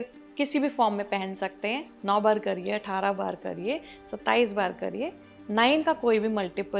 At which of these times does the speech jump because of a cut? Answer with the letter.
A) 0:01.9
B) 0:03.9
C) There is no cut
A